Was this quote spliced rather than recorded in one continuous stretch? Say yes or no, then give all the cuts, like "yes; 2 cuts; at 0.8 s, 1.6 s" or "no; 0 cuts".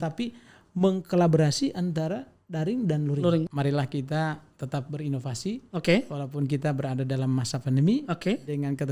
yes; 1 cut; at 3.5 s